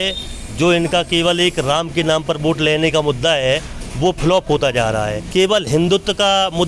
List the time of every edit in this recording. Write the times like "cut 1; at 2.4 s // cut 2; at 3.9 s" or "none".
cut 1; at 5.2 s

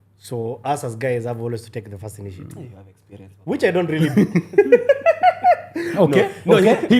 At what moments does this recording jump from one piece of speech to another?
none

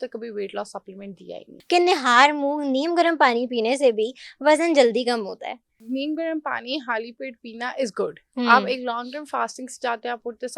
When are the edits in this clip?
cut 1; at 1.5 s // cut 2; at 5.8 s

